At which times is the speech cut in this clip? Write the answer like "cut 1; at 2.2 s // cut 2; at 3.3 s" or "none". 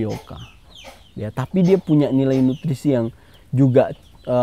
none